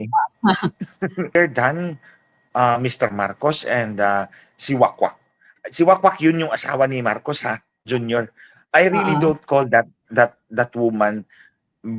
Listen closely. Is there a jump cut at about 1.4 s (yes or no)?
yes